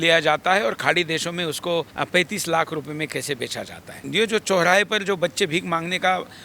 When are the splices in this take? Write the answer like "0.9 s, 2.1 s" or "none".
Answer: 1.9 s, 4.0 s